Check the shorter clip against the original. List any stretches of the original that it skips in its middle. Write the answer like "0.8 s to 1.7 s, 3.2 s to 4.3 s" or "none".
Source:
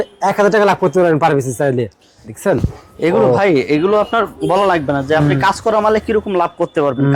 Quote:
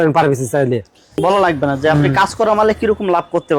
2.1 s to 4.3 s

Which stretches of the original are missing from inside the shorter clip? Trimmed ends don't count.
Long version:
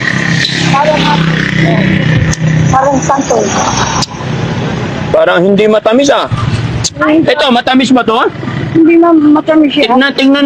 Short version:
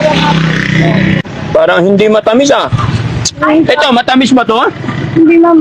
2.1 s to 4.8 s

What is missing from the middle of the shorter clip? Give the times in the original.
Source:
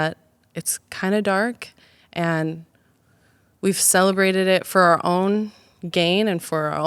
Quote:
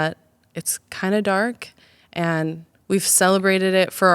2.7 s to 3.4 s

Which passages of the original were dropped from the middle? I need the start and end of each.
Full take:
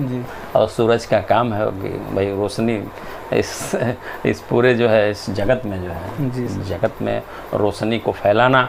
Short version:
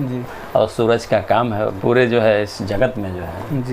1.8 s to 4.4 s

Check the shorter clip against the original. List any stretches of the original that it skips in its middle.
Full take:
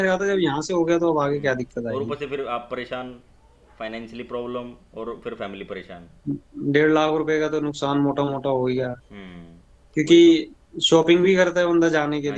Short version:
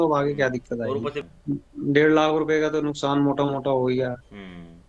2.3 s to 6.0 s

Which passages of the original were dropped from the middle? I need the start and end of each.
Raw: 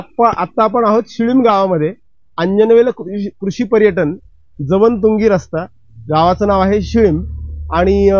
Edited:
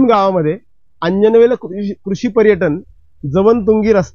none

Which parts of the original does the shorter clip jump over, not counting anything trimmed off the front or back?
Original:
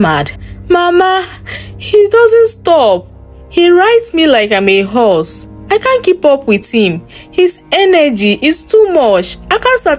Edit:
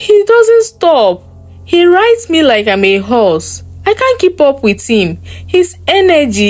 none

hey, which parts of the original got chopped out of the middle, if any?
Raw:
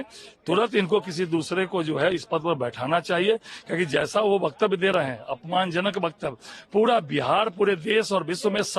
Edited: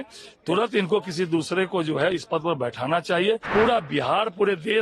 3.4 s to 6.6 s

